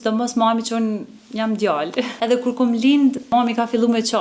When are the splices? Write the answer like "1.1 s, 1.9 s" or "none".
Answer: 2.1 s, 3.3 s